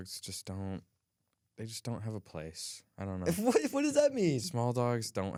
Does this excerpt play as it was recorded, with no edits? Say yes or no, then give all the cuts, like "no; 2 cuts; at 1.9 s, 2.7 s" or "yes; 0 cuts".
yes; 0 cuts